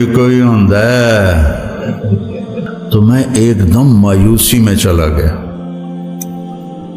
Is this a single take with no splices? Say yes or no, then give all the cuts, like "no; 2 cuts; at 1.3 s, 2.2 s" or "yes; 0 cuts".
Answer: no; 1 cut; at 2.6 s